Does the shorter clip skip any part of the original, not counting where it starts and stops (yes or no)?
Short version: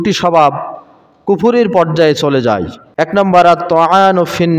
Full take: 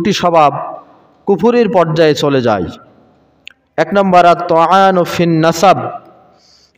yes